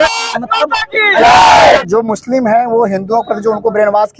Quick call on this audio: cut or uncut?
cut